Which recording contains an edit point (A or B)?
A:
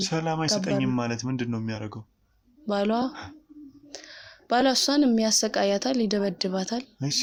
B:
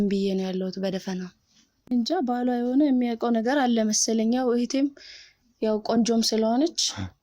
B